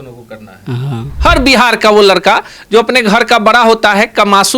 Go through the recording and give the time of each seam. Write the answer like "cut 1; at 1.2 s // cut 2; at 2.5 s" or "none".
cut 1; at 1.0 s